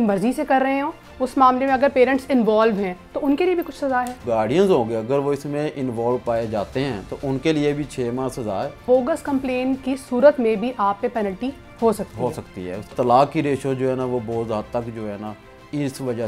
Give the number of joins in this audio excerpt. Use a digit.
3